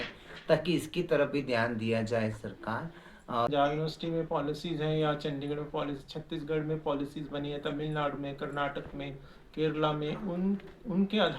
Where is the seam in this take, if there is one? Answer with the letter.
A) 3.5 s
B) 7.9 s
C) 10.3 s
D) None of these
A